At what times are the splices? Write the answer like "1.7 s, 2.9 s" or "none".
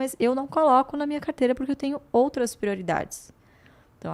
none